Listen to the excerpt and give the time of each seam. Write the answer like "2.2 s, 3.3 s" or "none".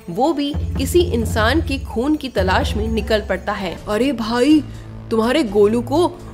3.7 s